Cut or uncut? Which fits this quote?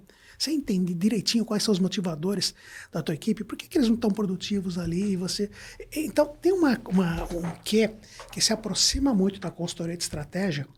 uncut